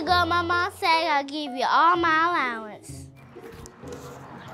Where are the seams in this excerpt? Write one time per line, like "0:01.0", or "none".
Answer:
none